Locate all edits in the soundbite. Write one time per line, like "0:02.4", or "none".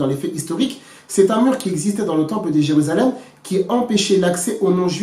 0:01.0